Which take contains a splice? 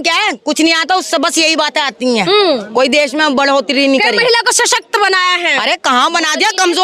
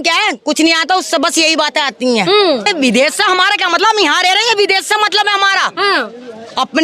second; 1 cut; at 2.7 s

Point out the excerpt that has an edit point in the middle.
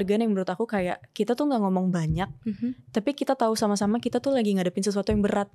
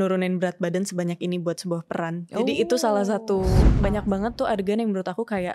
second; 1 cut; at 3.7 s

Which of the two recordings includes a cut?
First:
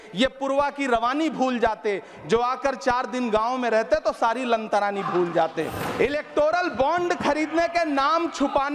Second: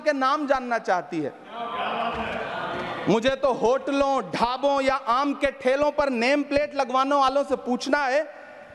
first; 1 cut; at 5.8 s

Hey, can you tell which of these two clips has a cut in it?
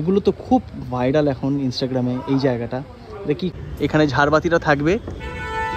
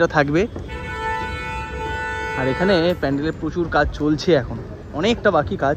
first; 1 cut; at 3.6 s

